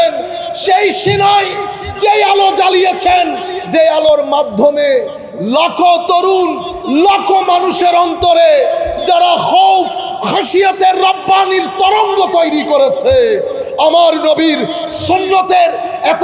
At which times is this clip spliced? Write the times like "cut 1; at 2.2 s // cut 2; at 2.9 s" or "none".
none